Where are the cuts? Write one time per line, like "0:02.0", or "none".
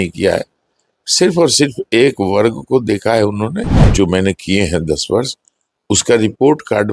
0:03.7